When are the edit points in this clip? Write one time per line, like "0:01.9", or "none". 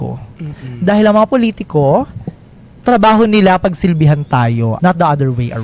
0:04.7